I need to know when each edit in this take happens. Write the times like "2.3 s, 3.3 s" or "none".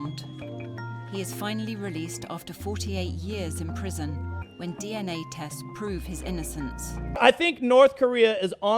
7.1 s